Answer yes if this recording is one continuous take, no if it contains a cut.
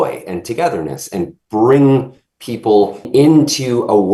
no